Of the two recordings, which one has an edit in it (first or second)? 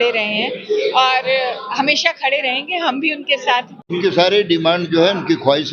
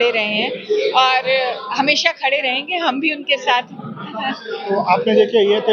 first